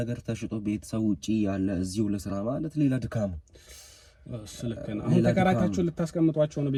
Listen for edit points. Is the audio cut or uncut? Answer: uncut